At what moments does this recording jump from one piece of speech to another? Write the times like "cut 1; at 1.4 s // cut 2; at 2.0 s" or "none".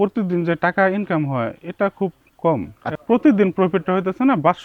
cut 1; at 2.9 s